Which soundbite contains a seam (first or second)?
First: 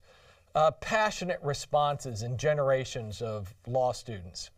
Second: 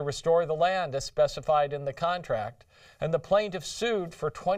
first